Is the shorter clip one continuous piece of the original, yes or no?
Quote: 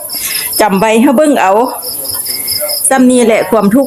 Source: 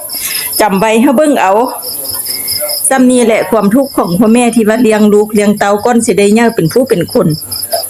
yes